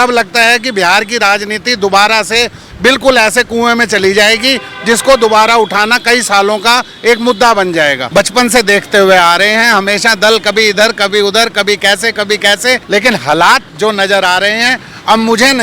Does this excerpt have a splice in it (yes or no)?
yes